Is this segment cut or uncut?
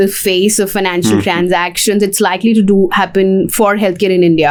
uncut